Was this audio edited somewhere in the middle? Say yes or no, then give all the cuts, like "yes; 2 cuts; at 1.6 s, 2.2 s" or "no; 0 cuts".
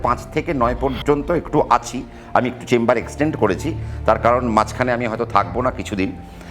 no; 0 cuts